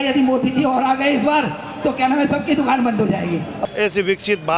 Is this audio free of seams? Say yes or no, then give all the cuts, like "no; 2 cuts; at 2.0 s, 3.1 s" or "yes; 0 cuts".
no; 1 cut; at 3.6 s